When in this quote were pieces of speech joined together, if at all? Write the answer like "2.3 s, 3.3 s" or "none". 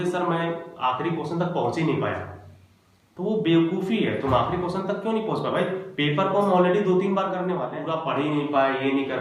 7.7 s